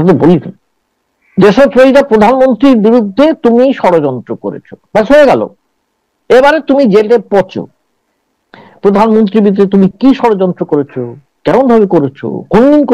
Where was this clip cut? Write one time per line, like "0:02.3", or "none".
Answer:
none